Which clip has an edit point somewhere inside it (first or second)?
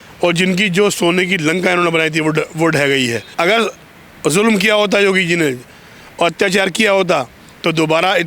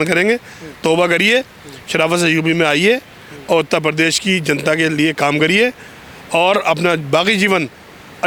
first